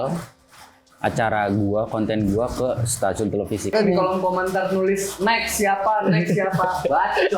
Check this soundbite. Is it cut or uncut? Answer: cut